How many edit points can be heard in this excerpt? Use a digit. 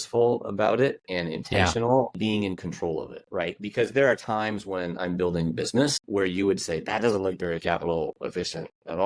2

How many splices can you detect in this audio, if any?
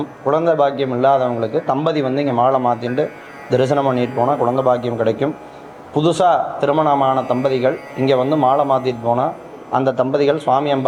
0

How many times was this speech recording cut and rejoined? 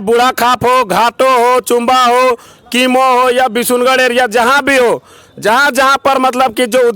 0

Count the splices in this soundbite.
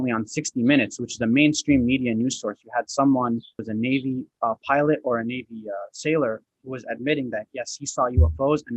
1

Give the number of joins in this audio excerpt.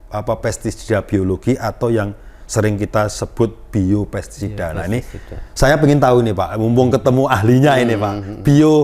0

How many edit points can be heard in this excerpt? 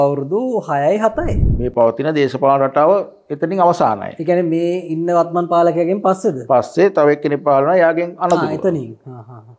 1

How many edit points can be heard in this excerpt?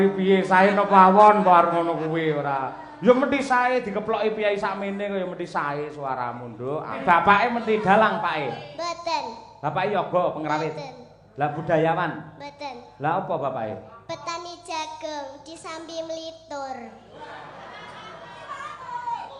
1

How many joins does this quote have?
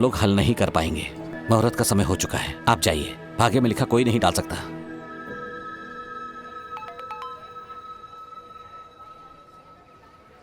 2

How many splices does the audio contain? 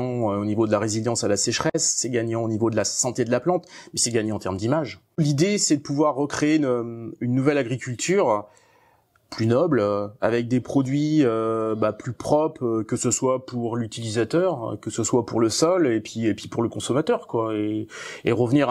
1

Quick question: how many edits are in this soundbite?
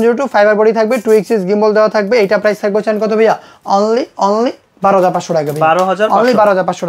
0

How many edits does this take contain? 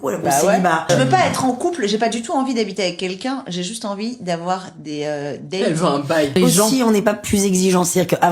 2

